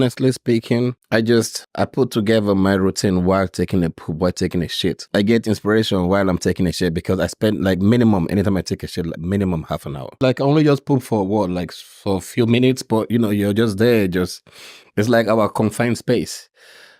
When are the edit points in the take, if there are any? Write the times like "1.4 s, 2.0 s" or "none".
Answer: 1.0 s, 1.6 s, 5.0 s, 10.2 s

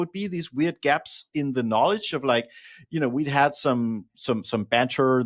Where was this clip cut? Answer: none

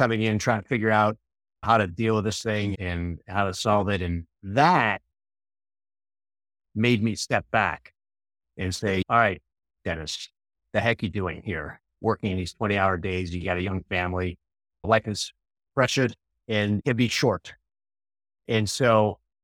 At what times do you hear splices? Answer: 16.8 s

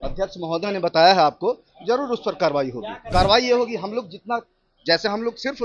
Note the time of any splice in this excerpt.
2.9 s

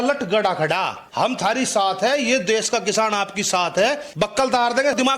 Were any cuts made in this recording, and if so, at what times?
1.2 s, 4.1 s

